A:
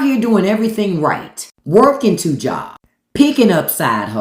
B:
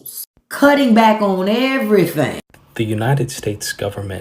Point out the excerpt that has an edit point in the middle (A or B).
B